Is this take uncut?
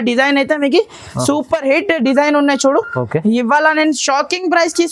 yes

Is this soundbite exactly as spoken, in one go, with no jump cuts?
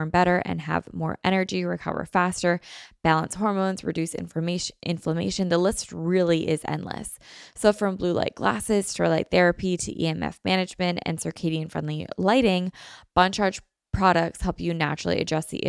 yes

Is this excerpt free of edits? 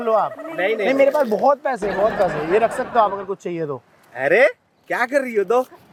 yes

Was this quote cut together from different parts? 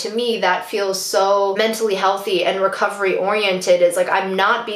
no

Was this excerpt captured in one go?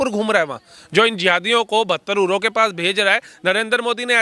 yes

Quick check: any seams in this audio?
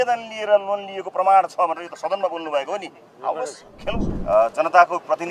yes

